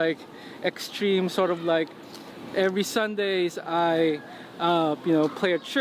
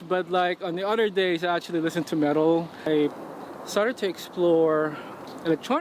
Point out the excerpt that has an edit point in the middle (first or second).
second